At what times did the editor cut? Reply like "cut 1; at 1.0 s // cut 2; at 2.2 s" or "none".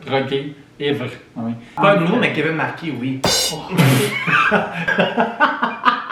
none